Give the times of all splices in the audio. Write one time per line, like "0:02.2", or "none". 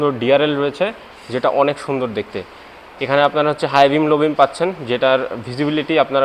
none